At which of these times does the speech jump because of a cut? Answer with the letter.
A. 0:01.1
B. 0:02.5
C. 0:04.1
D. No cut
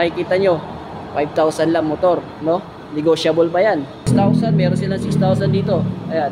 C